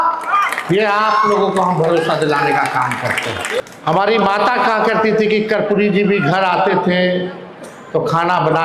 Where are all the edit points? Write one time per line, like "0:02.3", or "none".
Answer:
0:03.6